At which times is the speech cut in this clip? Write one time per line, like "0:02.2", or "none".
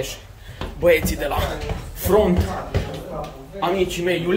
none